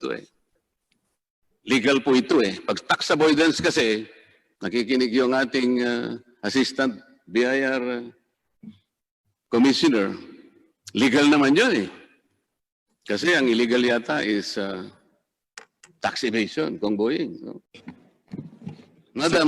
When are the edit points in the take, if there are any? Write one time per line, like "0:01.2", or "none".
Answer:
0:17.7